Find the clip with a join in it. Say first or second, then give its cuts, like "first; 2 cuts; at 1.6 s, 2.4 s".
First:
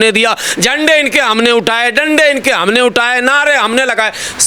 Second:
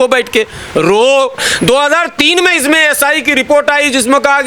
second; 1 cut; at 1.5 s